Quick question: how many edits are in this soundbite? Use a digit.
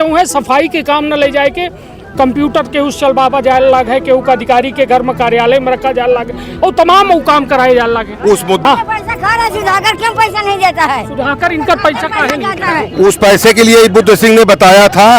1